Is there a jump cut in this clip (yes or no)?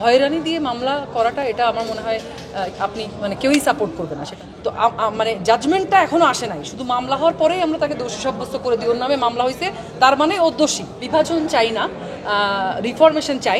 yes